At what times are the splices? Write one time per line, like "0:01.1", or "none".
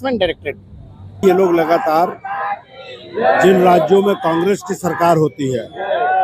0:01.2